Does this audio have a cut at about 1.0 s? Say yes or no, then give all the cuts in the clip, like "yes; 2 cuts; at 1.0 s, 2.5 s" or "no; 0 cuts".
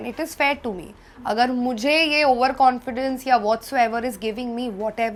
no; 0 cuts